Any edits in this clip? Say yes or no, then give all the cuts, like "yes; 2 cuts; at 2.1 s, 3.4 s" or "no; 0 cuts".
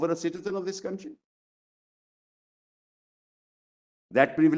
no; 0 cuts